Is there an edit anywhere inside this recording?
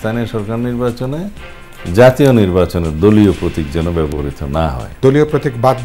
yes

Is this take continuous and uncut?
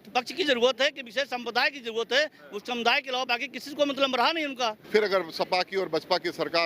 no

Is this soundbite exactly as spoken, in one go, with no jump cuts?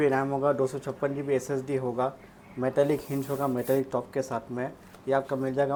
yes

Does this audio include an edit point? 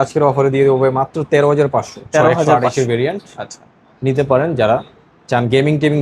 no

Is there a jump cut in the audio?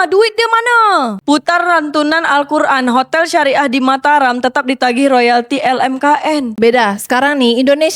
yes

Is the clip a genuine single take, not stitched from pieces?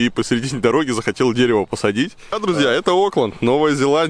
no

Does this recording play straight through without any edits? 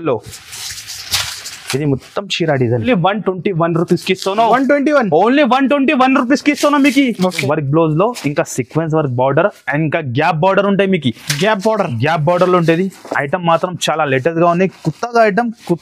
no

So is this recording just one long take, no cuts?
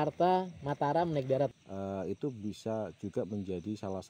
no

